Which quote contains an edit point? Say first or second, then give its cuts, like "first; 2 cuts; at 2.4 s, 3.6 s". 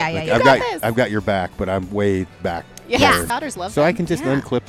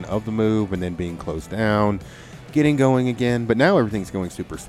first; 1 cut; at 3.3 s